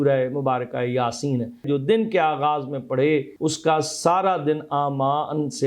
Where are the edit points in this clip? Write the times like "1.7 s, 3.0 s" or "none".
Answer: 1.6 s, 3.3 s